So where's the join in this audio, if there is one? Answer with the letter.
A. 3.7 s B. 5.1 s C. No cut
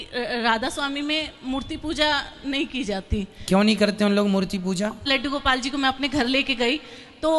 B